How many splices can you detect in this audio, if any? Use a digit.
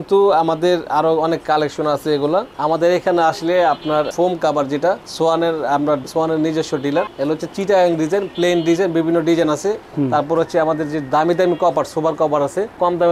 0